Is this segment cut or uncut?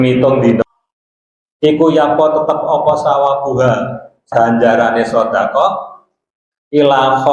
uncut